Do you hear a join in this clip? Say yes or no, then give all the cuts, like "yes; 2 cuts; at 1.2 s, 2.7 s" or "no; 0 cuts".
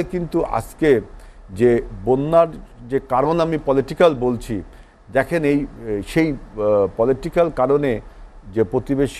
no; 0 cuts